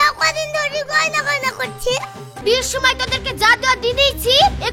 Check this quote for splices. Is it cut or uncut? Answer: cut